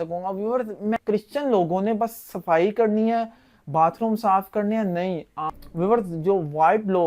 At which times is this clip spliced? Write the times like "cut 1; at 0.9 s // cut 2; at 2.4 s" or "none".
cut 1; at 1.0 s // cut 2; at 5.4 s